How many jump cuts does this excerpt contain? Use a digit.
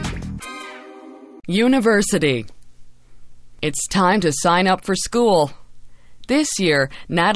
1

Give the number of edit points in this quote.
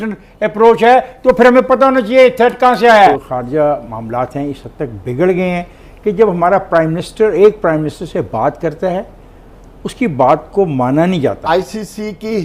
2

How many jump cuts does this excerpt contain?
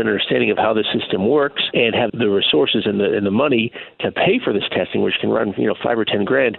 0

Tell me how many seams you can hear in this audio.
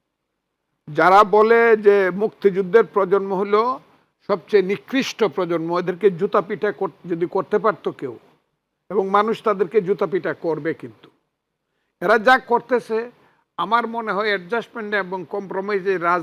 0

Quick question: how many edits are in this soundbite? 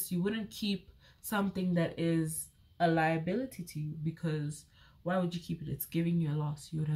0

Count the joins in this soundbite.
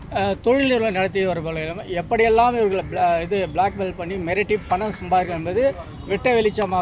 0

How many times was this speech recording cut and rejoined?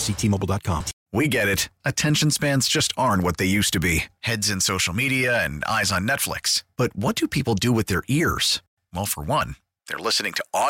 1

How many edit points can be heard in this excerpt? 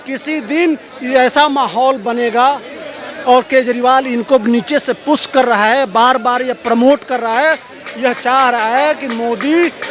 0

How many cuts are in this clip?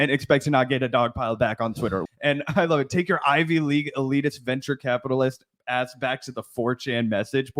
1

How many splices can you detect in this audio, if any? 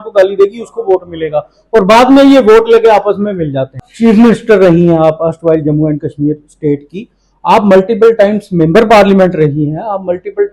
1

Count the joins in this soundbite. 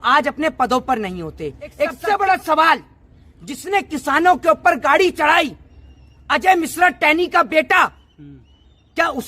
1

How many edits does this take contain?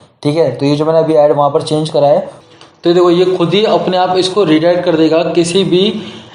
1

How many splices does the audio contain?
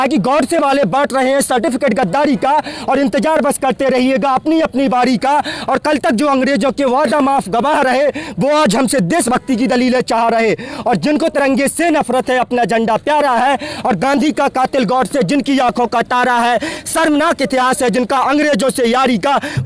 0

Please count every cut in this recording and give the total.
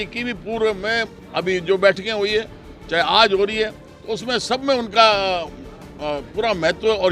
0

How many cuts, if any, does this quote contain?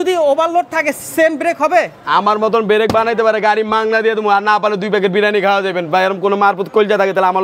0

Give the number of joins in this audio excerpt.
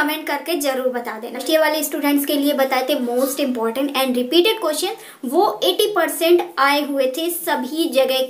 1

